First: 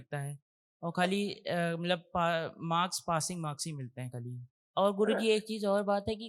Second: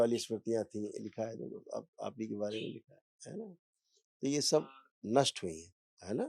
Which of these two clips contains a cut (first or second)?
first